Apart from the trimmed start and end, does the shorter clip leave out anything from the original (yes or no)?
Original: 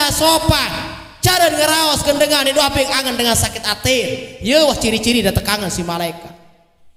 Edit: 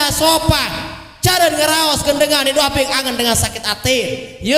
no